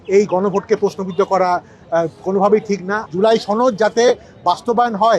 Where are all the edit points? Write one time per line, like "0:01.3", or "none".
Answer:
0:03.0